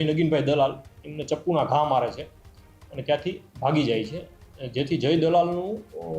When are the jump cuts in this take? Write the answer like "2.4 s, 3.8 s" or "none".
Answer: none